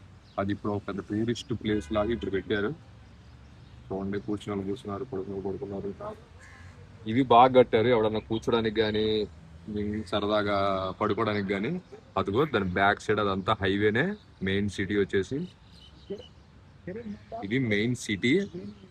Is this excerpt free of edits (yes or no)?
yes